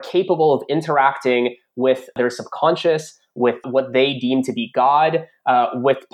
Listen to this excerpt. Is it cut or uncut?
cut